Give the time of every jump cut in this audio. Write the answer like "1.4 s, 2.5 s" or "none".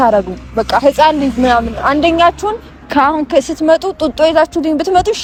none